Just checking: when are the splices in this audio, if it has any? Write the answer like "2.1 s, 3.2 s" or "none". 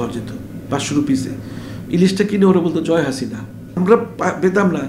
3.7 s